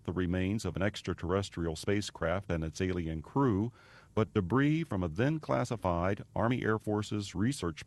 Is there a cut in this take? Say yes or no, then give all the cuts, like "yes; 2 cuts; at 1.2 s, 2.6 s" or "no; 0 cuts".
no; 0 cuts